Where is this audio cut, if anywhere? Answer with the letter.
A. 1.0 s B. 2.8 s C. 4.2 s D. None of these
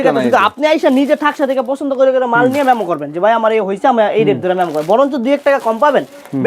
D